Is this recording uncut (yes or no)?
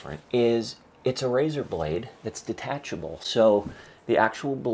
yes